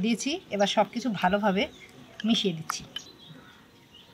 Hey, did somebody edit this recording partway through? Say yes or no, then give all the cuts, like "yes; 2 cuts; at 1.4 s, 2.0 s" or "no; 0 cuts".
yes; 1 cut; at 3.1 s